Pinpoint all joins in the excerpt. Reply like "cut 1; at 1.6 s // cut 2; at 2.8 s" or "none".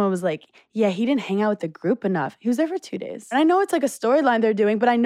cut 1; at 3.3 s